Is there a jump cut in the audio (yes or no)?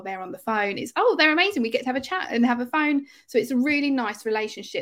no